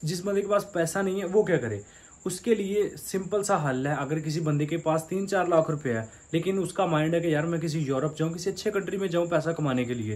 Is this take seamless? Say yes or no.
yes